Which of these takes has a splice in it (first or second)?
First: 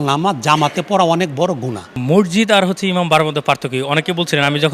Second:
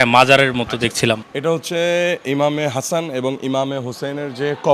first